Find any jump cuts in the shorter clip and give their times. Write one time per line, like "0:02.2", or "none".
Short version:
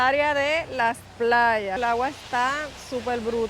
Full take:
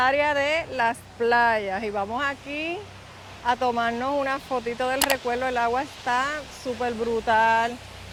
0:01.8